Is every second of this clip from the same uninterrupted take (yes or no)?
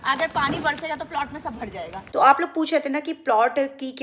no